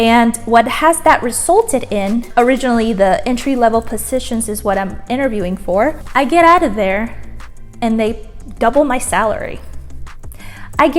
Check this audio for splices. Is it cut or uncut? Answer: uncut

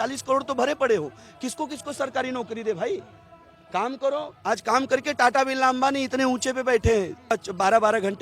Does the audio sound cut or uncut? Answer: cut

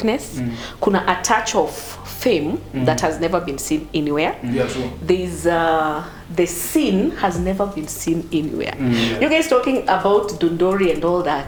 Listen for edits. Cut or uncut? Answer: uncut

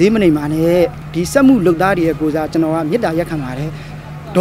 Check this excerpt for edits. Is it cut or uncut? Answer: cut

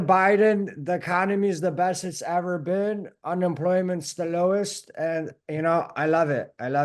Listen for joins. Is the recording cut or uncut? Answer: uncut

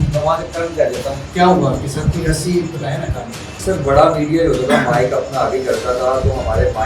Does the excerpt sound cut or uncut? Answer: cut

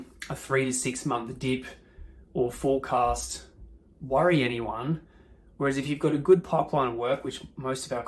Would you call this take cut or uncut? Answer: uncut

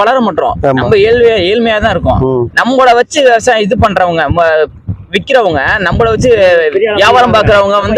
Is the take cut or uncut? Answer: uncut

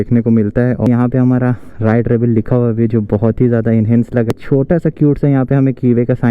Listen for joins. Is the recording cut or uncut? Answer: cut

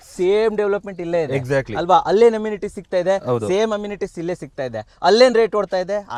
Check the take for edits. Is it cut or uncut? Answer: uncut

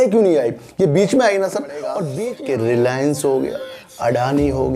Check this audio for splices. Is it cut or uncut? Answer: cut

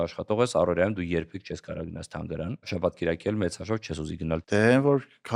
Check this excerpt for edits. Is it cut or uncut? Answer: cut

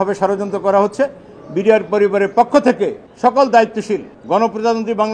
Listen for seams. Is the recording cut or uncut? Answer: cut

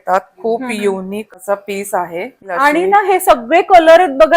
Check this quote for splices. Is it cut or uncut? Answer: cut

